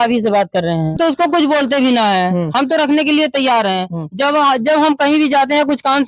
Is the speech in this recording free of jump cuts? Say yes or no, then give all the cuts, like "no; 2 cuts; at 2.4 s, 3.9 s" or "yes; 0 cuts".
no; 1 cut; at 1.0 s